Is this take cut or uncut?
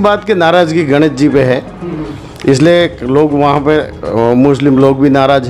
uncut